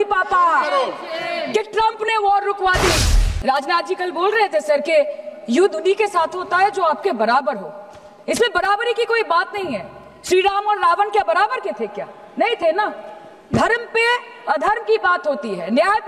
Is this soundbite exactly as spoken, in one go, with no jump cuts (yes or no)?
no